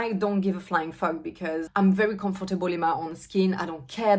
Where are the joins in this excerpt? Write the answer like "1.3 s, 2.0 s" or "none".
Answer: 1.7 s